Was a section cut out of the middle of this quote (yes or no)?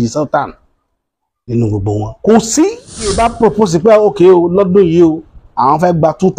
yes